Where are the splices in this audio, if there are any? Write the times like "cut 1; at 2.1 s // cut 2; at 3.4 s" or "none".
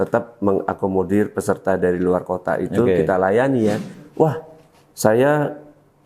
cut 1; at 3.9 s